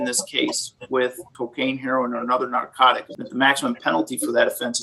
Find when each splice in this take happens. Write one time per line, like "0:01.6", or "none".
0:01.3
0:03.1